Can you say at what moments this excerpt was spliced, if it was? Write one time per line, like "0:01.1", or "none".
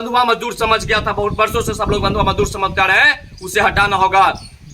none